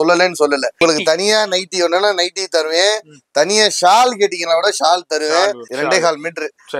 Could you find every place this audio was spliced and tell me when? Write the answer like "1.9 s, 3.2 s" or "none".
0.8 s, 5.7 s

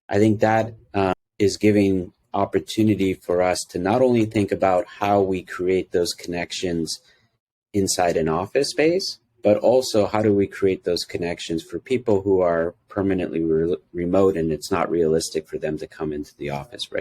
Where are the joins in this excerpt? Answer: 1.1 s

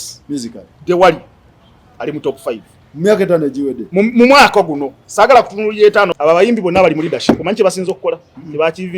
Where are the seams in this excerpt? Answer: 6.1 s

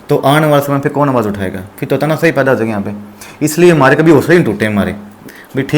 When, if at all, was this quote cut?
none

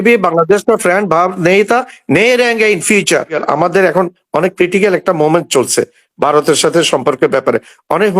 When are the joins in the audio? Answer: 3.4 s

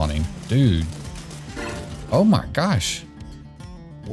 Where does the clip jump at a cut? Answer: none

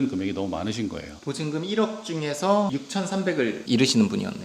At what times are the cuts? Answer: 1.1 s, 2.7 s

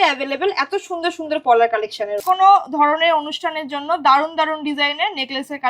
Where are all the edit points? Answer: 2.2 s

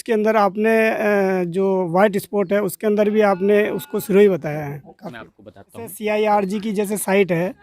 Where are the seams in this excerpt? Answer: 5.9 s

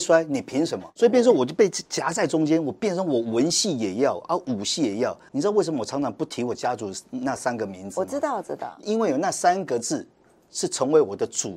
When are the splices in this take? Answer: 8.8 s

